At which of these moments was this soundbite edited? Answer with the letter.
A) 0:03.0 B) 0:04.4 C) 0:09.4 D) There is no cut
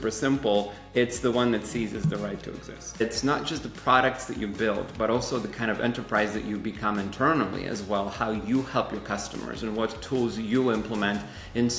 A